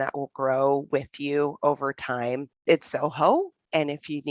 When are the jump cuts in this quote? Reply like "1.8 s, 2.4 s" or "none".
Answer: 2.5 s

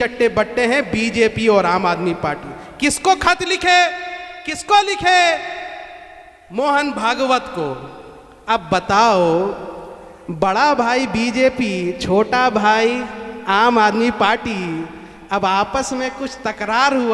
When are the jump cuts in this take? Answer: none

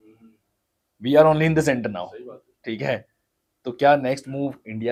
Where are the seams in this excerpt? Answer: none

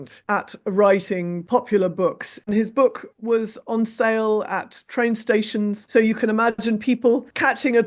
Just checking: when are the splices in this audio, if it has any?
2.3 s

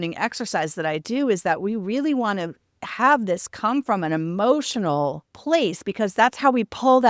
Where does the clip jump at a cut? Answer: 5.3 s

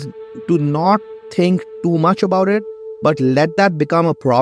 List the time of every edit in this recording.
none

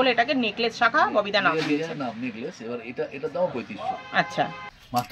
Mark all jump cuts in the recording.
none

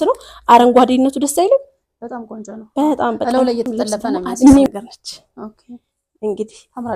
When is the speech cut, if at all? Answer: 4.7 s

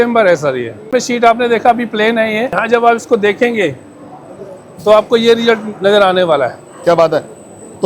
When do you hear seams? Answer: 0.9 s, 2.6 s

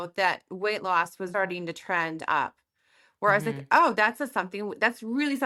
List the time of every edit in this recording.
none

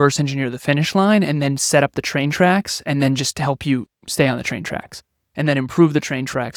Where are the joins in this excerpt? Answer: none

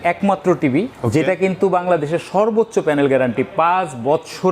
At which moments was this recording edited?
1.0 s

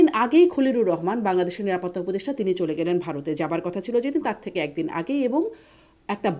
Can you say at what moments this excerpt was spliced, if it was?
none

